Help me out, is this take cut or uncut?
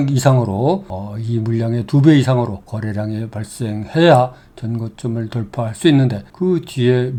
uncut